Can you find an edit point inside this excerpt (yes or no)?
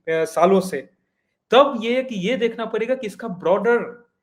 no